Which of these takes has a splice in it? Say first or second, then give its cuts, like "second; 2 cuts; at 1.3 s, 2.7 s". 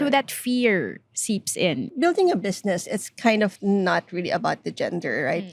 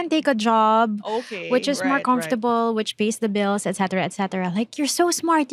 first; 1 cut; at 1.9 s